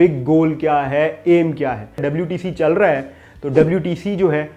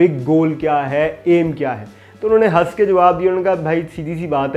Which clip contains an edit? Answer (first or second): first